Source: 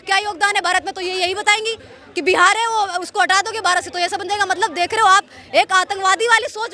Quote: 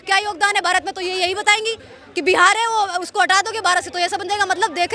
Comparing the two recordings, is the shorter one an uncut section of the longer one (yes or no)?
yes